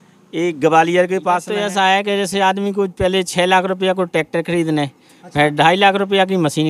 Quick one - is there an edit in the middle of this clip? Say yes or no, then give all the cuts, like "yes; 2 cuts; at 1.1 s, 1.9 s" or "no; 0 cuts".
yes; 1 cut; at 1.5 s